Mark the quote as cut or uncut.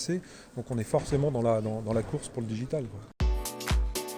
cut